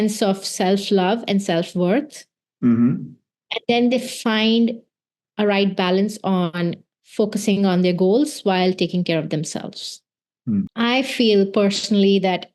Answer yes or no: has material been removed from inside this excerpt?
yes